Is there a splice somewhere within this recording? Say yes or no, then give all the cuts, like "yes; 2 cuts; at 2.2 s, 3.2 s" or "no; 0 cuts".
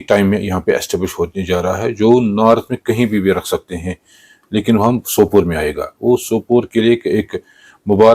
no; 0 cuts